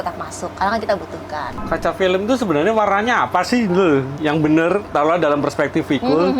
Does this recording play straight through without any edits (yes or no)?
no